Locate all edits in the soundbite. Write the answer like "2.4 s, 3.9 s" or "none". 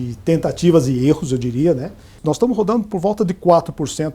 2.1 s

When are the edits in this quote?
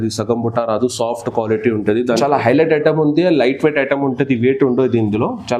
2.2 s

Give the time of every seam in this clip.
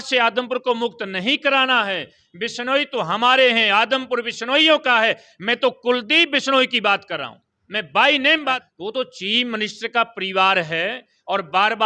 8.6 s

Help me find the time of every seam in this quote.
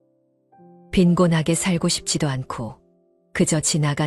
0.9 s

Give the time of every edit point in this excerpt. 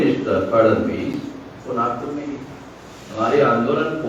none

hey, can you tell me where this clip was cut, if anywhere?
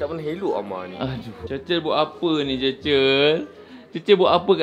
1.3 s

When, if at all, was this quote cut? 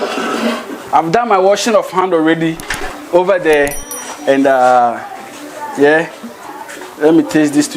none

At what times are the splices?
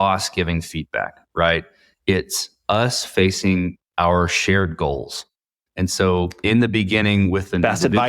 5.5 s

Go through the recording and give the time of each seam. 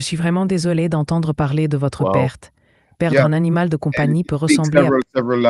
none

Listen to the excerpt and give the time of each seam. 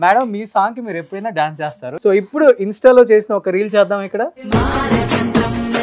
1.8 s, 4.4 s

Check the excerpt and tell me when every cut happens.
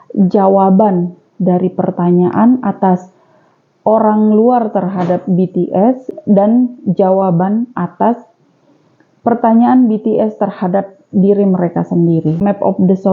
6.1 s, 12.4 s

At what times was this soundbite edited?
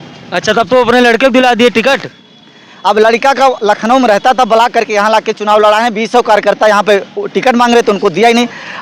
none

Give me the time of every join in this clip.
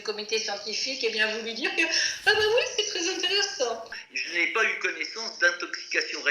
3.9 s

